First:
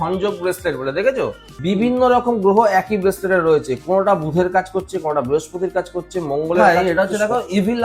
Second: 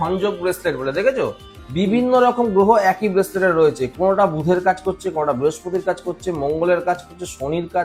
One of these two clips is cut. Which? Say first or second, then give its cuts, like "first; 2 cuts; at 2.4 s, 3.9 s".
first; 2 cuts; at 1.5 s, 6.6 s